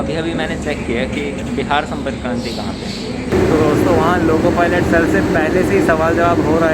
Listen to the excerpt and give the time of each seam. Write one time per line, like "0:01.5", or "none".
0:01.5
0:03.3

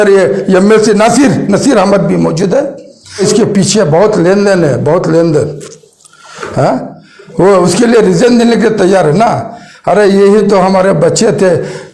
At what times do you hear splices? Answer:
0:03.2

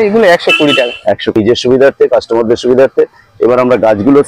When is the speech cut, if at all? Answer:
0:01.3

